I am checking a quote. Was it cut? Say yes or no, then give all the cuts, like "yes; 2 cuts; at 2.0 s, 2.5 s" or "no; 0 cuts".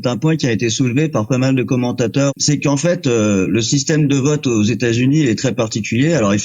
yes; 1 cut; at 2.3 s